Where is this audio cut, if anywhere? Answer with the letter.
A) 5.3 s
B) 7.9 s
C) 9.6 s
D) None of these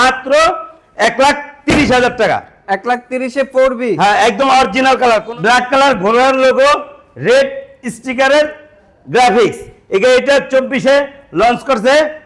A